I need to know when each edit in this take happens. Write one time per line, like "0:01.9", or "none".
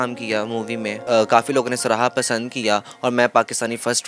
0:01.0